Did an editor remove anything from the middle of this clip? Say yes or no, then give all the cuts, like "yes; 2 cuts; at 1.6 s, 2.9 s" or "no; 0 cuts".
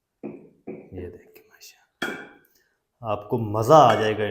no; 0 cuts